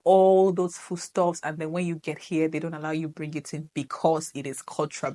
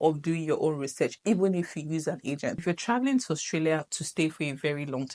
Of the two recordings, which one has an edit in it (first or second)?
second